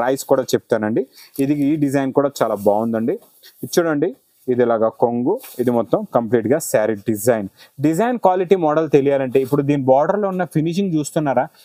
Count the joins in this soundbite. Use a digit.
0